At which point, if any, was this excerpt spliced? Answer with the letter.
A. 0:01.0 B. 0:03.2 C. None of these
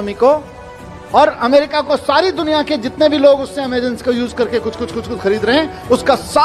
C